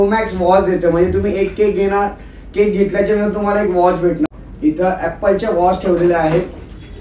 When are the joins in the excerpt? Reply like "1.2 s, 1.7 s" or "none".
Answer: 4.3 s

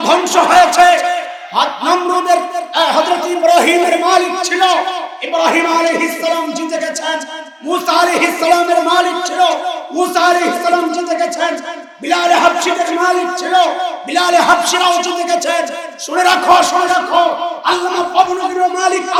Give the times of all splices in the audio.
none

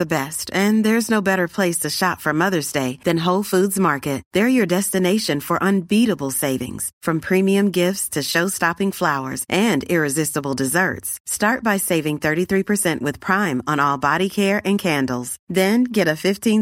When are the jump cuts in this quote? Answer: none

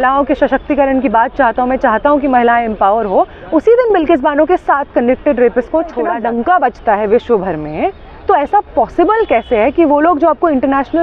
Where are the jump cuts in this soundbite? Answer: 6.1 s

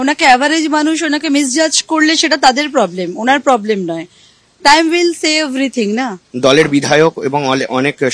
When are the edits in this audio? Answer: 6.2 s

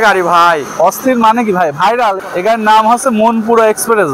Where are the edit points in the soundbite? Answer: 2.2 s

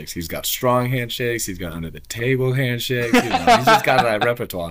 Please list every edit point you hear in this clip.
none

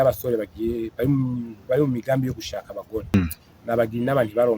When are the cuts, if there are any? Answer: 3.2 s

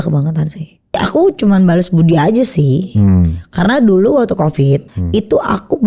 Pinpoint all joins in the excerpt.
1.0 s, 4.9 s

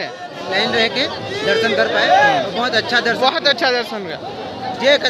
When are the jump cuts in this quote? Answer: none

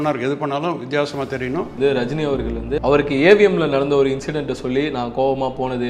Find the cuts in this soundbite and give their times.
1.7 s, 2.8 s

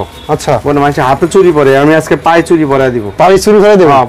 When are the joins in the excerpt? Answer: none

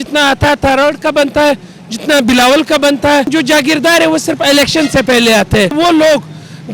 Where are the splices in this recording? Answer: 3.3 s, 5.7 s

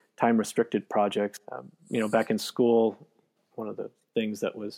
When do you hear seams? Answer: 1.4 s, 3.4 s

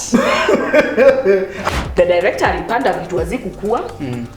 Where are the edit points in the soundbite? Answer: 1.6 s

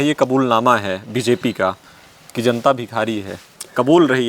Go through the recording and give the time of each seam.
none

